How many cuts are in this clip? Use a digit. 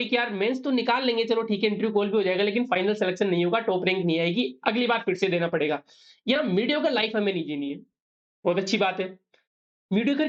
0